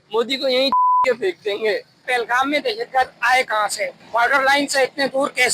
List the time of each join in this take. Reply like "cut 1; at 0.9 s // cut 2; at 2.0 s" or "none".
cut 1; at 2.1 s // cut 2; at 4.0 s